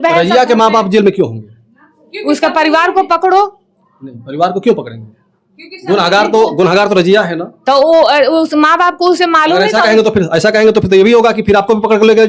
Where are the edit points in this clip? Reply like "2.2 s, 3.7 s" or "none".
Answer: none